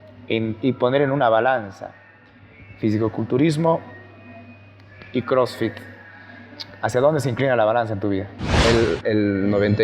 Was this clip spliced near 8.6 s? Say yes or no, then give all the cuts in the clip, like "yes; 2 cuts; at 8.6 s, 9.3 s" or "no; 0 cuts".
yes; 1 cut; at 8.6 s